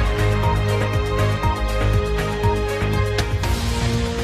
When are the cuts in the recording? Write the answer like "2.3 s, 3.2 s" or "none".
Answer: 3.2 s

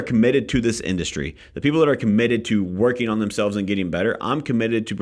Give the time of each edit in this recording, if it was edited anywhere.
none

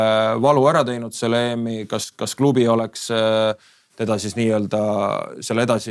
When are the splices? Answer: none

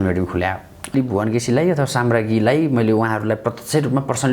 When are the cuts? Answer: 0.9 s

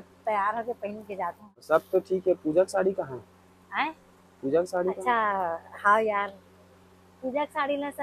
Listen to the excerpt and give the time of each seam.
1.4 s

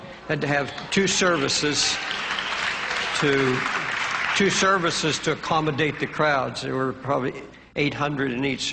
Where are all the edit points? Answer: 7.7 s

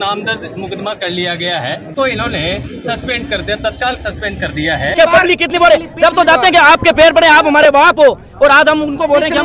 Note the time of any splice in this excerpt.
1.9 s, 4.9 s

